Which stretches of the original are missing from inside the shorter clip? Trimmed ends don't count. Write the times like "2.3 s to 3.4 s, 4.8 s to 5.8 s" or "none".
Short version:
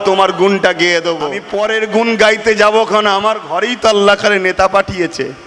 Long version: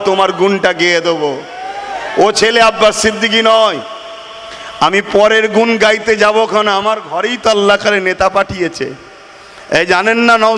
1.4 s to 5.0 s